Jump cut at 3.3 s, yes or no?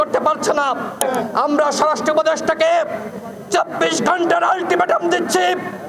no